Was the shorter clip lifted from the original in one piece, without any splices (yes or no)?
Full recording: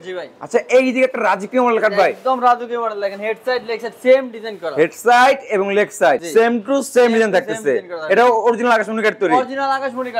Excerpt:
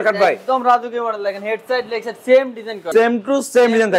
no